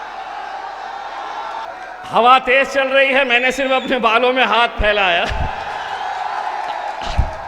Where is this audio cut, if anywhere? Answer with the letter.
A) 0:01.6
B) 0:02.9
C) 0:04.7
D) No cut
A